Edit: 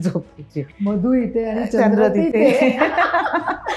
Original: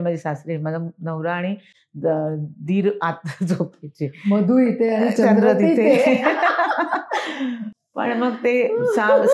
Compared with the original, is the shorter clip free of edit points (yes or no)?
yes